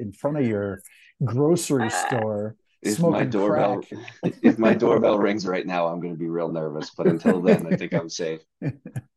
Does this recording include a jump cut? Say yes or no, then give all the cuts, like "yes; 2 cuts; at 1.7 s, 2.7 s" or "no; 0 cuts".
no; 0 cuts